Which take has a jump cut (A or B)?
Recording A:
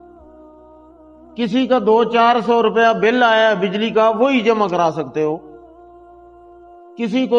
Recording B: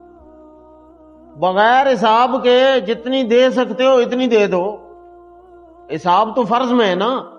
B